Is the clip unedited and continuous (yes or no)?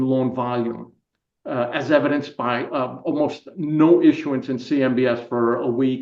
yes